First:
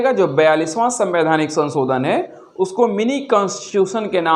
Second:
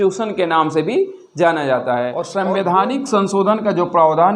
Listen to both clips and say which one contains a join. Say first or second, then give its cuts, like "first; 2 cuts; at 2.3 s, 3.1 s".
second; 1 cut; at 2.2 s